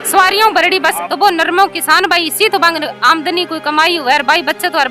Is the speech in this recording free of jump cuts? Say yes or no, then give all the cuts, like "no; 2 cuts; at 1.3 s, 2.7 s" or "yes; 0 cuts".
no; 1 cut; at 1.0 s